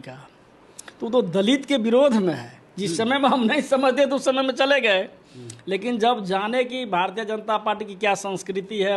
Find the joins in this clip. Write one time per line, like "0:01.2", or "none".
none